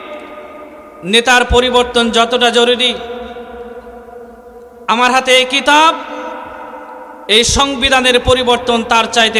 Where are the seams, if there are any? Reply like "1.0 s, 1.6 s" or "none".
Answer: none